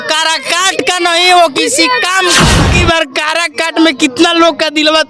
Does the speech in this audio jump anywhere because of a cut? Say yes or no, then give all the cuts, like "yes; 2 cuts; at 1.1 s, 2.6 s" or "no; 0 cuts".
yes; 1 cut; at 2.5 s